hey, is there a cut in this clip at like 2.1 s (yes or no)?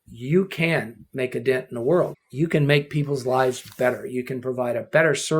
yes